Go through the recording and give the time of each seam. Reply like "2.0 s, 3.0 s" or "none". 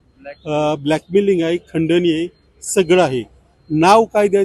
none